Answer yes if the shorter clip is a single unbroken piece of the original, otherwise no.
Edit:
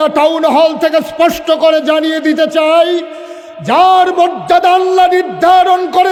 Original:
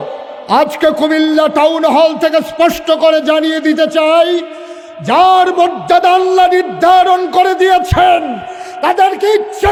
yes